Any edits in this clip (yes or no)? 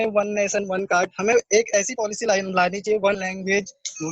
yes